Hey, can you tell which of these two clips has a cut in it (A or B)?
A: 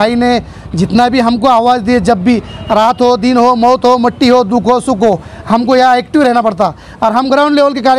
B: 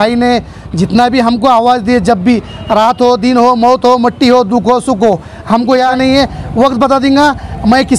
B